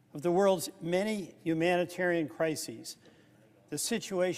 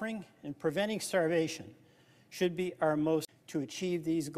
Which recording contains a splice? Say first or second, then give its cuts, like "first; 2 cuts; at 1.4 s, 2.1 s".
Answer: second; 1 cut; at 3.2 s